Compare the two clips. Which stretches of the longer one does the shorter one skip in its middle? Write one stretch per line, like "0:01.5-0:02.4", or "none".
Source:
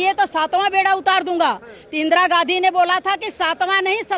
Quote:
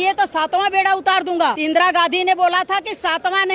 0:01.6-0:01.9